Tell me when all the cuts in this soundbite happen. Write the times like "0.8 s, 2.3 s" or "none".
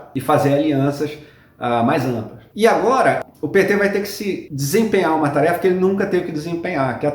2.4 s, 3.2 s